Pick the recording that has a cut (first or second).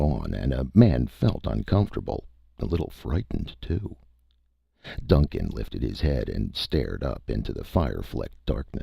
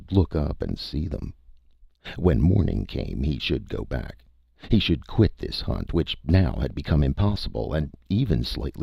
first